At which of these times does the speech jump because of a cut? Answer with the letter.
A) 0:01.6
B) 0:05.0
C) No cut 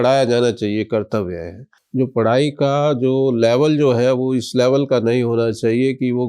A